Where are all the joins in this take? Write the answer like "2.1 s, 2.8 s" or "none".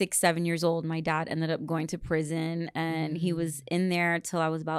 none